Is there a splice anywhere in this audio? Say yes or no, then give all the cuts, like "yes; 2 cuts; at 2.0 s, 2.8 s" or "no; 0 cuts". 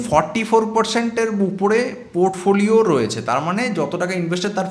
no; 0 cuts